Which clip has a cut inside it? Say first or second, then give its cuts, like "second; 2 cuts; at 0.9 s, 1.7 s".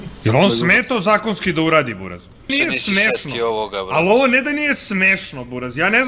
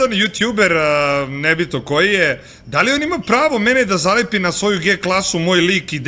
first; 1 cut; at 2.5 s